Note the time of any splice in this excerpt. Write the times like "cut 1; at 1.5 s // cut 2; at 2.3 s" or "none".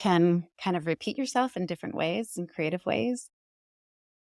none